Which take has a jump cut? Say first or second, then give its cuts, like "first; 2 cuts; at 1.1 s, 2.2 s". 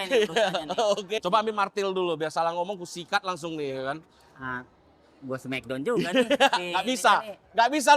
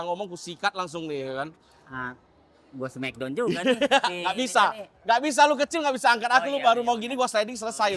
first; 1 cut; at 1.2 s